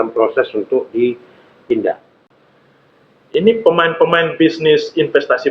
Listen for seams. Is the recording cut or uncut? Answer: cut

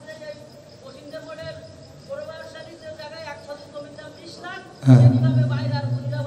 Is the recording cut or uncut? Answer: uncut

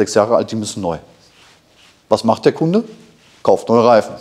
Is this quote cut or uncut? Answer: uncut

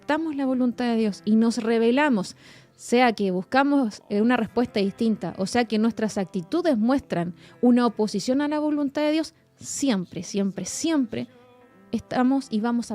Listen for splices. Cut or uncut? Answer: uncut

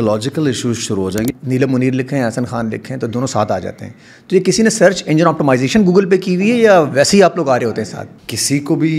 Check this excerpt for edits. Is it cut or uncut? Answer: cut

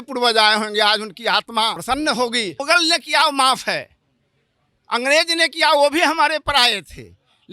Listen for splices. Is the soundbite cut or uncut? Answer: cut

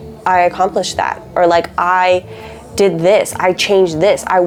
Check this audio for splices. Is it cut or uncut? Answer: uncut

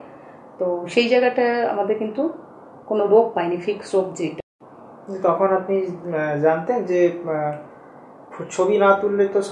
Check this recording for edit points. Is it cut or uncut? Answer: cut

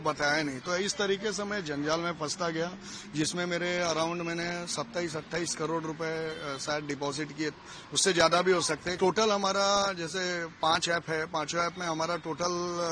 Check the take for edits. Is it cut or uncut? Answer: cut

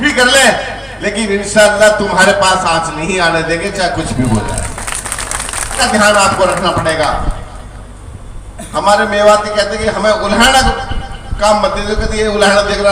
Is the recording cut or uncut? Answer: cut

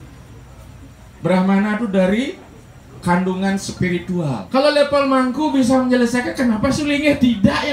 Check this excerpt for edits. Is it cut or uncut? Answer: cut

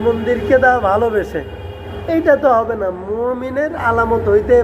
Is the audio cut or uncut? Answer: cut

